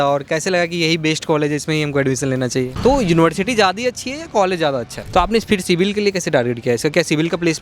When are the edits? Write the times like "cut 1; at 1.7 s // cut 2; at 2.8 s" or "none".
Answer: cut 1; at 2.7 s // cut 2; at 5.0 s

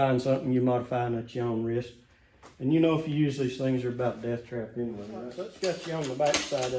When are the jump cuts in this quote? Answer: cut 1; at 5.4 s

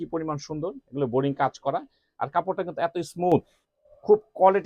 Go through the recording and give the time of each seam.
none

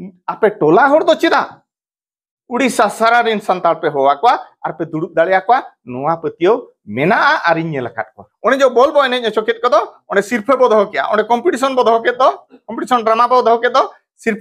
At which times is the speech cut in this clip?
cut 1; at 8.2 s

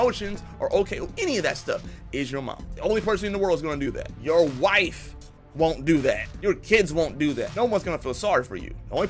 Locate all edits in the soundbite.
cut 1; at 2.6 s // cut 2; at 4.1 s // cut 3; at 6.3 s // cut 4; at 7.5 s

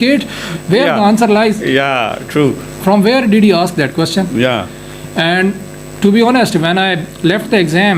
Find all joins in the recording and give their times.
none

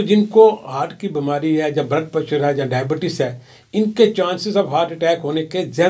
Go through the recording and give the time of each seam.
none

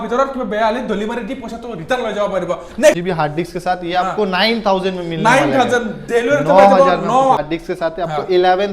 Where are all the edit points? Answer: cut 1; at 3.0 s // cut 2; at 7.4 s

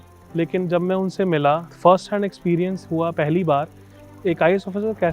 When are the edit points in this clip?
cut 1; at 1.7 s // cut 2; at 4.1 s

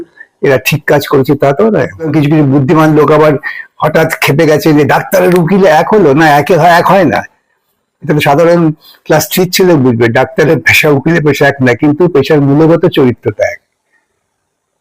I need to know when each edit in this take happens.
cut 1; at 2.1 s

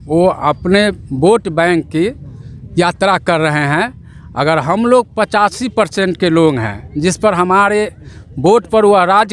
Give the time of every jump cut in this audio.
none

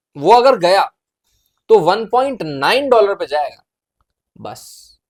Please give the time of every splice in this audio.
none

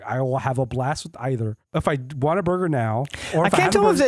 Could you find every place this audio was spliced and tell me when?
cut 1; at 1.6 s

